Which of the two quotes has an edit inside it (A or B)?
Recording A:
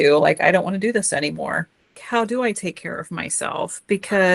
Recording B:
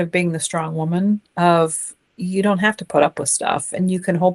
A